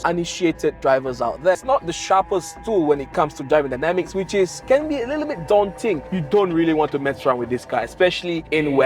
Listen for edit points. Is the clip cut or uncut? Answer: cut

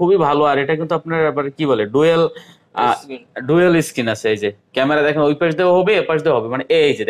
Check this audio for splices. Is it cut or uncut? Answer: uncut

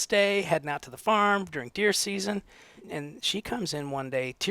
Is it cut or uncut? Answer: cut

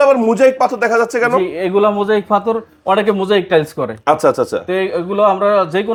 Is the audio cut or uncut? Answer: uncut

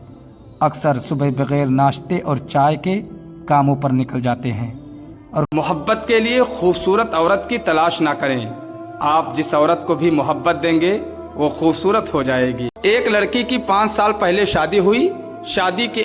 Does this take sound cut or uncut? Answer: cut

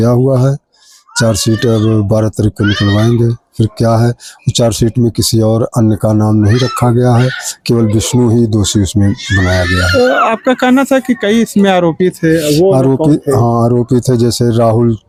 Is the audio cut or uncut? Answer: uncut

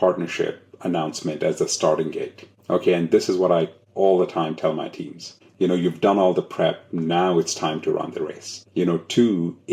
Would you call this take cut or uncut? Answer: uncut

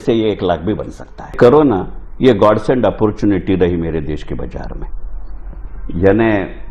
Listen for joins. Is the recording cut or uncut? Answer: cut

